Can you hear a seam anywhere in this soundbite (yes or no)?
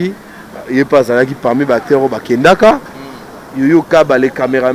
no